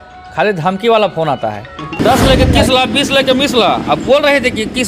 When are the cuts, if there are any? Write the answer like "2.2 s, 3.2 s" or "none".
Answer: 2.0 s